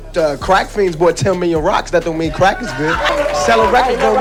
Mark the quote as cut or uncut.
uncut